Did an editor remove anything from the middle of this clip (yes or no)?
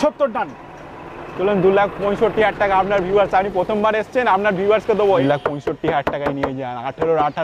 yes